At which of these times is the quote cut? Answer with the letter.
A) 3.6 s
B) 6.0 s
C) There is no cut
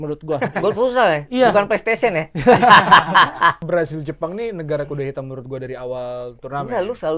A